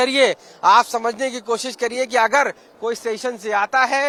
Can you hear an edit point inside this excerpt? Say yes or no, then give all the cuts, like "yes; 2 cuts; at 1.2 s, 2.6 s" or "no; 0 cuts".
no; 0 cuts